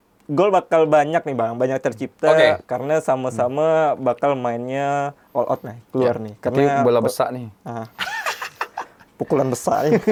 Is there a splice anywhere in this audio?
no; 0 cuts

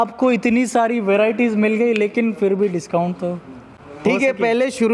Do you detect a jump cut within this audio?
no; 0 cuts

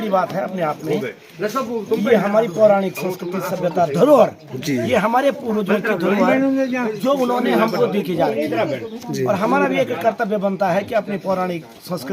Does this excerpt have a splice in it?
no; 0 cuts

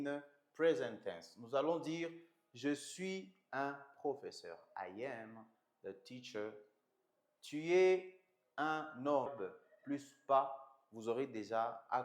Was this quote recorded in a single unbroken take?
no; 1 cut; at 9.3 s

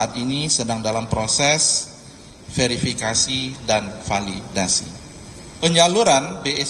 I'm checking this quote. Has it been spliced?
yes; 1 cut; at 5.4 s

